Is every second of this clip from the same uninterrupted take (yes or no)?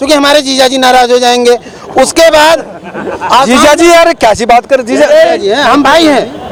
yes